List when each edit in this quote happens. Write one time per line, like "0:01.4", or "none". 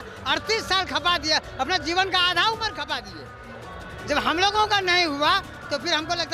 none